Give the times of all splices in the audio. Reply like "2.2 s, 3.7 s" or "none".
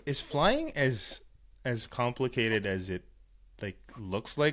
none